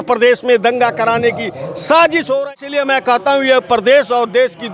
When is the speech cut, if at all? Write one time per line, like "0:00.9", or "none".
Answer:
0:02.4